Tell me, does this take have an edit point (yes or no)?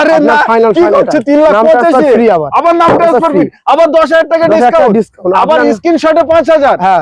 no